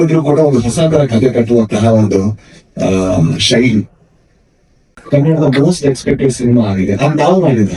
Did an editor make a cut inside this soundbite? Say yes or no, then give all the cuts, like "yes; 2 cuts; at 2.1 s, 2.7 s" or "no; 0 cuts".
yes; 1 cut; at 4.9 s